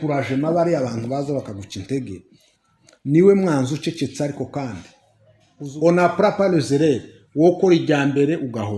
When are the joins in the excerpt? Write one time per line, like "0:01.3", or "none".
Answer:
0:05.6

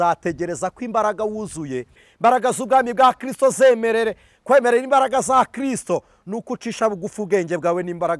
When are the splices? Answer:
0:02.1

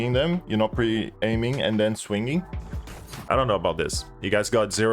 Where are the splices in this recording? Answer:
0:02.5

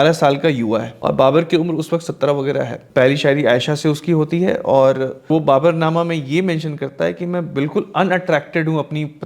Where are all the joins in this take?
0:00.9
0:02.8
0:05.3

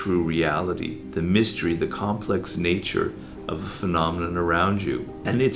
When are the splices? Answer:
none

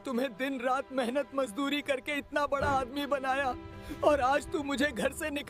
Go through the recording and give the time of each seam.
none

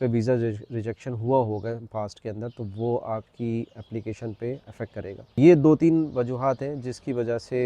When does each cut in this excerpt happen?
0:05.4

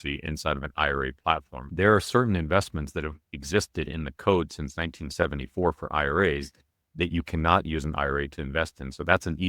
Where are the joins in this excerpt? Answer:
0:01.6

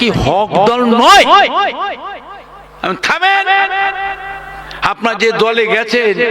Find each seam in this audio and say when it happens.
none

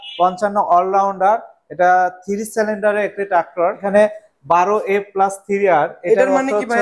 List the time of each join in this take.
0:03.8

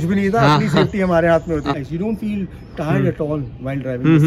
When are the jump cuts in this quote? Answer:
0:01.7

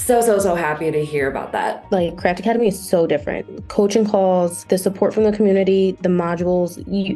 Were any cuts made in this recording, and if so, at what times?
0:01.8

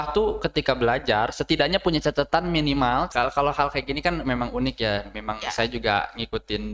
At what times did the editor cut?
0:03.1

